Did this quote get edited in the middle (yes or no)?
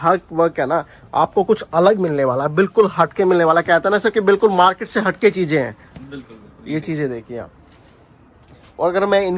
no